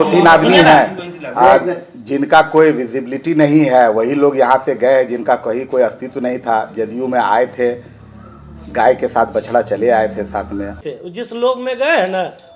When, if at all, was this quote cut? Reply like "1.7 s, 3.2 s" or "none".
10.8 s